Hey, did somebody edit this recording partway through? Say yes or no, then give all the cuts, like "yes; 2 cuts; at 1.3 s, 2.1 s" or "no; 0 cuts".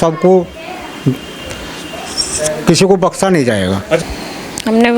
yes; 1 cut; at 4.0 s